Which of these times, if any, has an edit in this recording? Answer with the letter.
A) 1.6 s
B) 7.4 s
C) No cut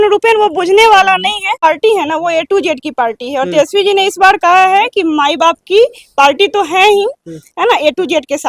A